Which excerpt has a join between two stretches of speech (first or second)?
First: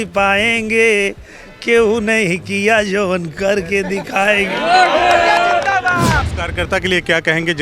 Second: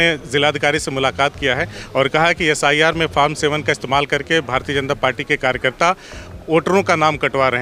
first